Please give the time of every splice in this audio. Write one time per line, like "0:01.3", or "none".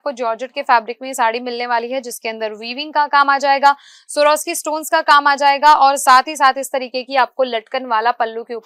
none